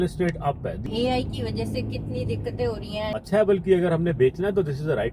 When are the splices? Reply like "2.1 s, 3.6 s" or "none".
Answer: 0.8 s, 3.2 s